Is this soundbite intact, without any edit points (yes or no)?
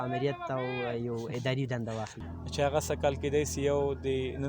no